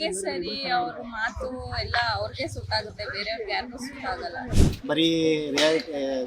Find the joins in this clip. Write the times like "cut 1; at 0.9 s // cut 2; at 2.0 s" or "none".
cut 1; at 4.5 s